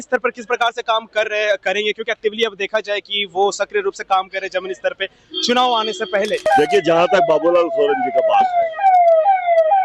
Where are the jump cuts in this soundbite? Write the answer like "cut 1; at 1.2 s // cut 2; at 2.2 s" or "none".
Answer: cut 1; at 6.5 s